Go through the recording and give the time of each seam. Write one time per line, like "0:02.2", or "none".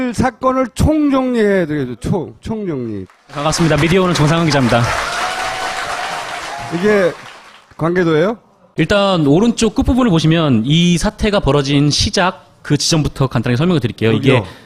none